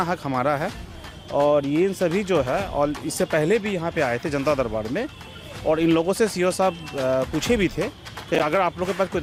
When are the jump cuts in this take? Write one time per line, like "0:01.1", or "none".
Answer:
none